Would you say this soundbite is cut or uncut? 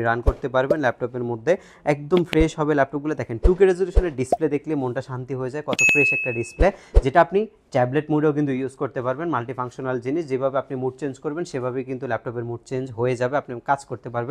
uncut